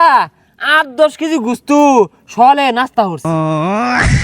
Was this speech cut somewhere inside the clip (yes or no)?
yes